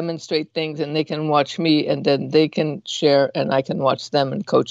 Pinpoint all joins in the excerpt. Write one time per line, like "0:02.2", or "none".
none